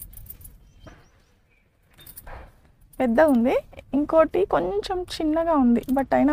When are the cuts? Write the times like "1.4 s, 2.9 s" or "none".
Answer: none